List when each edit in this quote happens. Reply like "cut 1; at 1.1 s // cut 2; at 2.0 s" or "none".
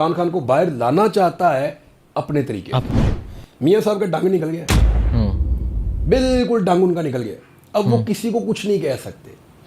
cut 1; at 2.9 s

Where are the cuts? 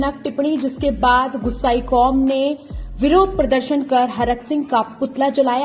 none

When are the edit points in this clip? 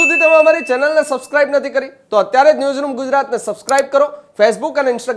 none

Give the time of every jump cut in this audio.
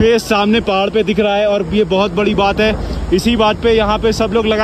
none

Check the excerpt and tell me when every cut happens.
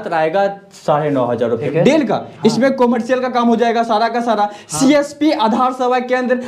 cut 1; at 1.6 s

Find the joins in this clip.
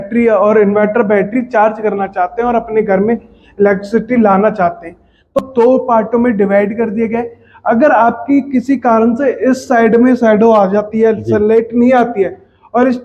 cut 1; at 5.4 s

